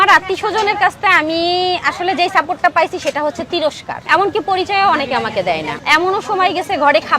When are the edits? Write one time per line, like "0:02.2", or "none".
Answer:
0:04.0
0:05.7